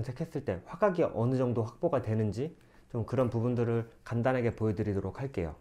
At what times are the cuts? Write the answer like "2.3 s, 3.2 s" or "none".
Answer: none